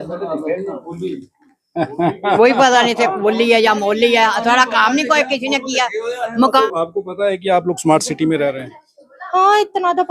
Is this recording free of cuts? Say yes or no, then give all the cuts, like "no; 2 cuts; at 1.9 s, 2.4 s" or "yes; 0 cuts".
no; 1 cut; at 6.6 s